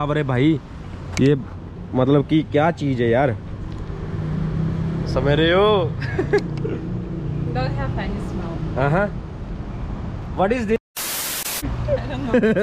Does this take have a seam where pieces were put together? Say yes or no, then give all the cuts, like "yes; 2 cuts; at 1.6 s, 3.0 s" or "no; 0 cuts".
no; 0 cuts